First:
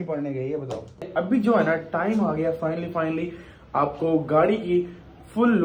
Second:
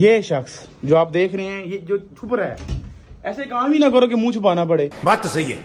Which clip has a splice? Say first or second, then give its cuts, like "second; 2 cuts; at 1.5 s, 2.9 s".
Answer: first; 1 cut; at 1.1 s